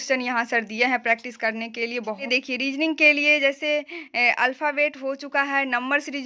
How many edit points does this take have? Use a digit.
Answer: 1